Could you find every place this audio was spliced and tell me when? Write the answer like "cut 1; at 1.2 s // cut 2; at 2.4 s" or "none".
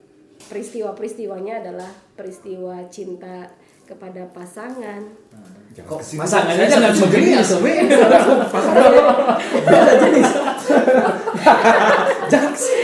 none